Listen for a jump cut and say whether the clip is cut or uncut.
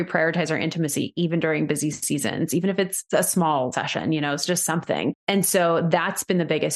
cut